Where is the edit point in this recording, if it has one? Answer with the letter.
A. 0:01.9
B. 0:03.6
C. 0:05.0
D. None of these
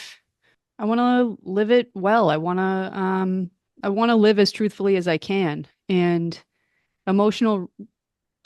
B